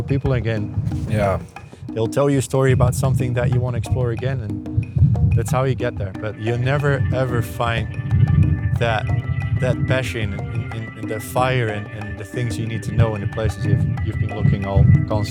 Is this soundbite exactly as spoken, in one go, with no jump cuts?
yes; 0 cuts

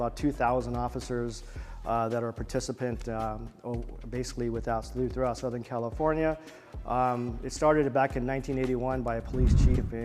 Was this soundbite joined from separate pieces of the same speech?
no; 0 cuts

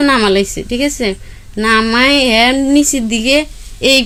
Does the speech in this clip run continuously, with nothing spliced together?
yes; 0 cuts

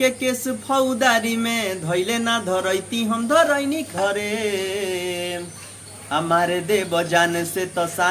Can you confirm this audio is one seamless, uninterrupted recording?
no; 1 cut; at 3.9 s

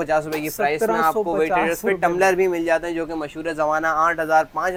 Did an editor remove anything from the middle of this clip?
no; 0 cuts

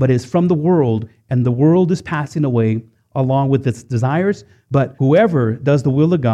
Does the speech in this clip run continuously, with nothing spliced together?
no; 1 cut; at 4.7 s

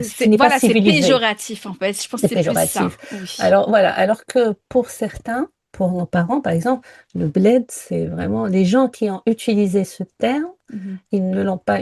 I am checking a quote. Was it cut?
no; 0 cuts

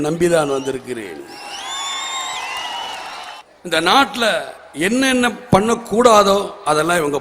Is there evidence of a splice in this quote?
yes; 1 cut; at 3.4 s

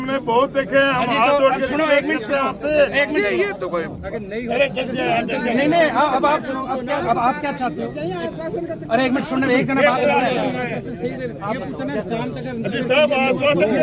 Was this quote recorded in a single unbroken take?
yes; 0 cuts

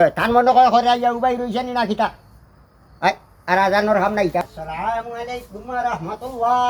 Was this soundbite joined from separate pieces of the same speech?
yes; 1 cut; at 4.4 s

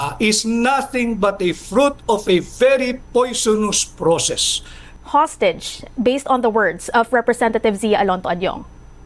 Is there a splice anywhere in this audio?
yes; 1 cut; at 4.8 s

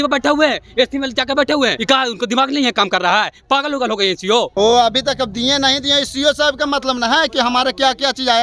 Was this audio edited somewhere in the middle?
yes; 2 cuts; at 1.8 s, 4.5 s

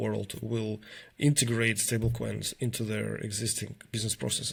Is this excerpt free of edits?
yes; 0 cuts

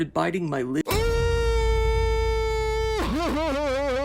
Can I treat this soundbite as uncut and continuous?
yes; 0 cuts

